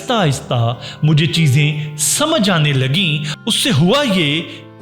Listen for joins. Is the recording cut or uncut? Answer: uncut